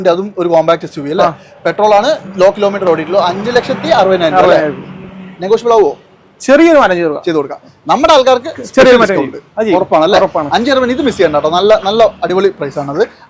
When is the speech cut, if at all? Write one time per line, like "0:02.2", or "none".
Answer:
none